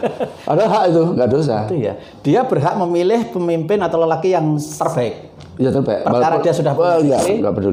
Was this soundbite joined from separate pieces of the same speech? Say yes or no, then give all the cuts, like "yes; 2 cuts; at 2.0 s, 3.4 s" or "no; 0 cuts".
no; 0 cuts